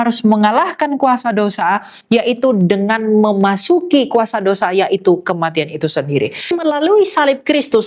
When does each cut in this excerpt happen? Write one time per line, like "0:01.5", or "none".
0:06.6